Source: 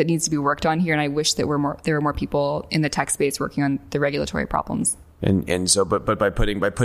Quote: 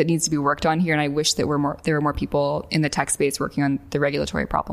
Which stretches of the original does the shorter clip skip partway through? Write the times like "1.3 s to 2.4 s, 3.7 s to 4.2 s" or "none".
none